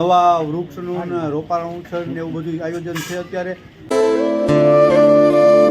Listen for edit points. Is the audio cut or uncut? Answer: cut